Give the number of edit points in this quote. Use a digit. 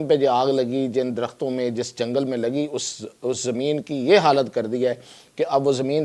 0